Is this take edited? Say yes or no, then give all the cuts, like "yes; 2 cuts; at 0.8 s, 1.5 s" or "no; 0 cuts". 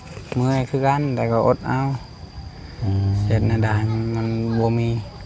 no; 0 cuts